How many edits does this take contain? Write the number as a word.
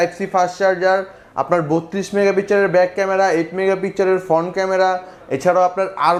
zero